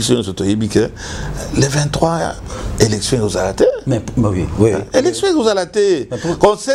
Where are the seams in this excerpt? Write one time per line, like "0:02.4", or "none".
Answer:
none